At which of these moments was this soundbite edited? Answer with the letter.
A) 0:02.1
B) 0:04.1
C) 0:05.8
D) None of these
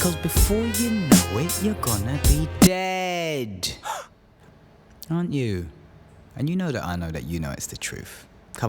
B